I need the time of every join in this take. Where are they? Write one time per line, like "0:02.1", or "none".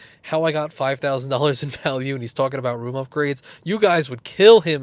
none